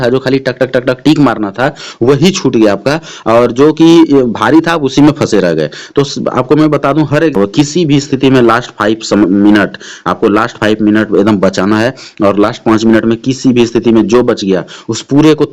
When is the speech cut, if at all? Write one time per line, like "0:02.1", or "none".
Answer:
0:07.4

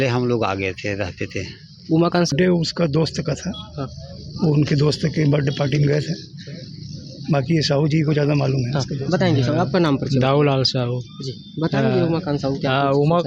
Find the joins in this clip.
0:02.3

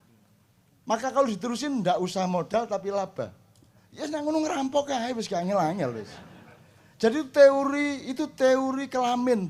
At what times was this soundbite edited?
none

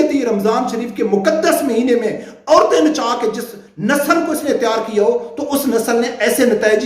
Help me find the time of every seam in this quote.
none

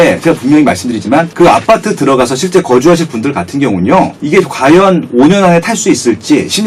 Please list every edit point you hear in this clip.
0:01.3
0:04.2

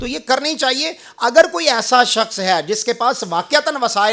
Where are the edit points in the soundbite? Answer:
none

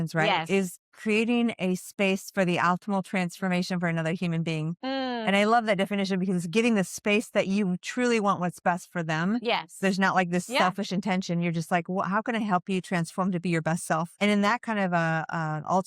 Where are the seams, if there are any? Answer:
0:14.2

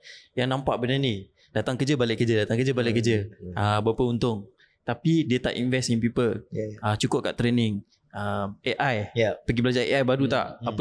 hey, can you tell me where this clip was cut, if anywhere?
none

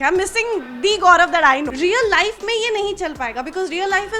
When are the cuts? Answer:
0:01.7

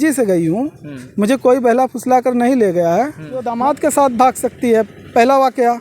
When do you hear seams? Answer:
0:03.7

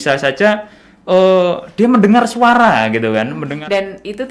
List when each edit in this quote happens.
0:03.4

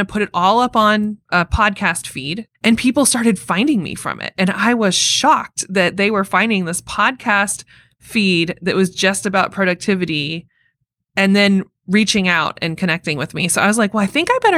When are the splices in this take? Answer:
0:01.2
0:02.4

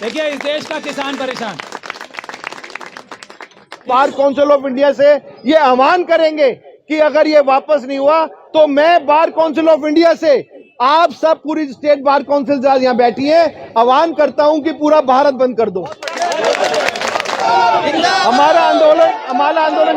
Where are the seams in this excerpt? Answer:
0:03.9
0:17.4

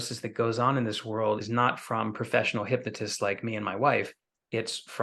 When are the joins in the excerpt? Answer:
0:01.4

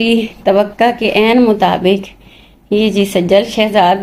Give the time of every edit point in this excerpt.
none

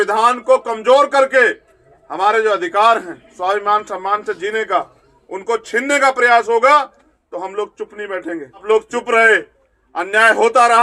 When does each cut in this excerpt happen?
0:08.6

